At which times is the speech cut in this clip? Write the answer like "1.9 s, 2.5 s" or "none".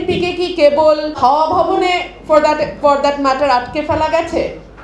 1.2 s